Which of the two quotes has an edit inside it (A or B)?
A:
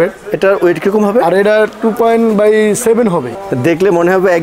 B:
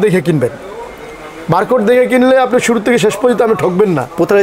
A